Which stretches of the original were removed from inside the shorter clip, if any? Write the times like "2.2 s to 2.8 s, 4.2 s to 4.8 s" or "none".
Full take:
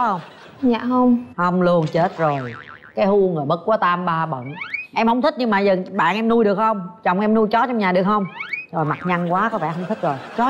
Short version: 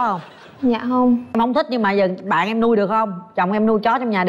1.3 s to 5.0 s